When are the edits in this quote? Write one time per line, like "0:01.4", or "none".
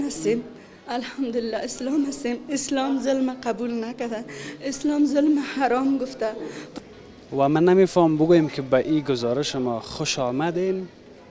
0:06.7